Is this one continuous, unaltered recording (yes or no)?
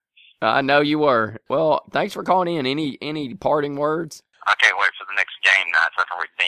no